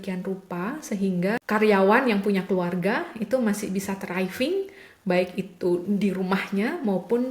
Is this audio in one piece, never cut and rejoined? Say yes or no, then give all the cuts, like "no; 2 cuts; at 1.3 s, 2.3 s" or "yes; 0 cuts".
no; 1 cut; at 1.4 s